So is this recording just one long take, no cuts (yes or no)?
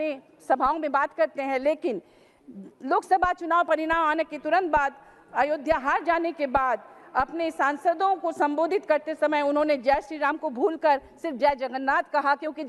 yes